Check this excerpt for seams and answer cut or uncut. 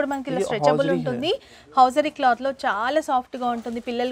uncut